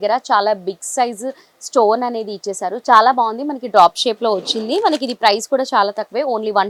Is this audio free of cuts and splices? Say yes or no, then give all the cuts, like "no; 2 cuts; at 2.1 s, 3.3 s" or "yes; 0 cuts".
yes; 0 cuts